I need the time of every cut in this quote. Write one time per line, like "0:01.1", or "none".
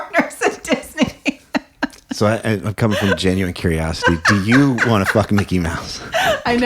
none